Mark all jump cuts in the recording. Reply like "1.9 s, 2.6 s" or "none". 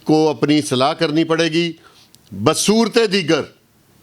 none